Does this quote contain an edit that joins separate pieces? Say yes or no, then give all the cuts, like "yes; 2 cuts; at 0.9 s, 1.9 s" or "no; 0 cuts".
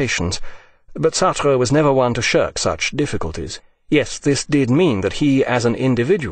no; 0 cuts